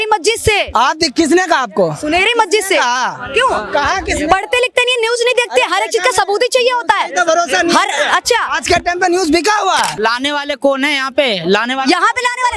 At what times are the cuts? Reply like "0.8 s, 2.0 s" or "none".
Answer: 9.9 s